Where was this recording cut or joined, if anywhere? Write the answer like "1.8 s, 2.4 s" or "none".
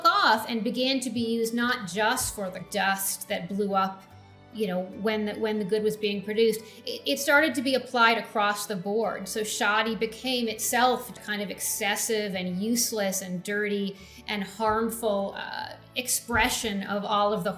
2.7 s, 11.1 s